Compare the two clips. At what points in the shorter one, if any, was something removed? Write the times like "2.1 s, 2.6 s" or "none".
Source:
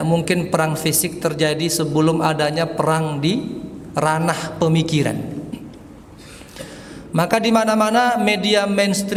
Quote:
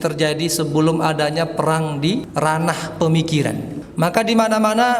2.3 s, 3.8 s